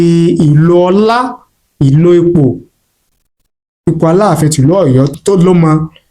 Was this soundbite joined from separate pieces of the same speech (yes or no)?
yes